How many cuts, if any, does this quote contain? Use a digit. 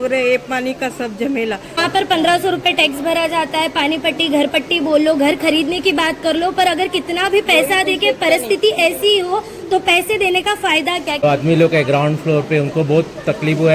2